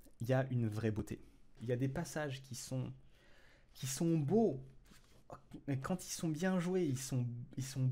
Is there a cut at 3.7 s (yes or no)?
no